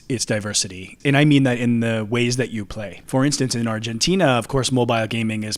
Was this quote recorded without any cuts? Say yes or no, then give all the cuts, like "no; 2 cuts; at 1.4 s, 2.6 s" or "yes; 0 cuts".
no; 2 cuts; at 1.0 s, 2.9 s